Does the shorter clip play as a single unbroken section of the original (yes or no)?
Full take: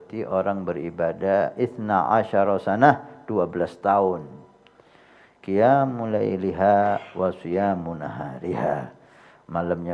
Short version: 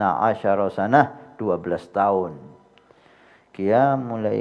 yes